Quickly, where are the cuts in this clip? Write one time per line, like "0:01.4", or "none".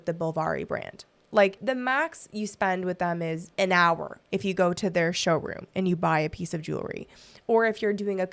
none